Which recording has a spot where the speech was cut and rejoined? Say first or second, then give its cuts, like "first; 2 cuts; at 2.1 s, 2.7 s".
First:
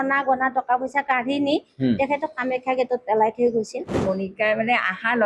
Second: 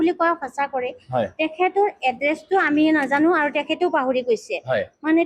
first; 1 cut; at 4.0 s